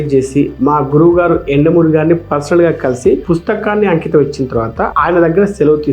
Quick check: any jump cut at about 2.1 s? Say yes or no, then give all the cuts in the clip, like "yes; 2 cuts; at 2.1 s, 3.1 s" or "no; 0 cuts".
no; 0 cuts